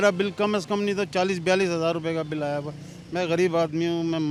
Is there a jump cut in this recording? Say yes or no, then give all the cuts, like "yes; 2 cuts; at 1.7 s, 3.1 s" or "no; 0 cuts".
no; 0 cuts